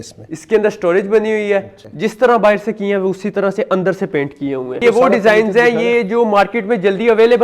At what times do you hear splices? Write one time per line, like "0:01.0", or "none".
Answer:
0:01.8
0:04.8